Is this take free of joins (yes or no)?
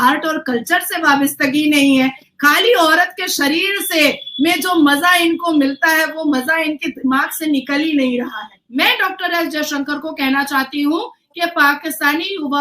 no